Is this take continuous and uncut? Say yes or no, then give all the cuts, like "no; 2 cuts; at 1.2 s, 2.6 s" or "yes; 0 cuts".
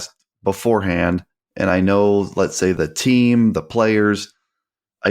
no; 1 cut; at 2.8 s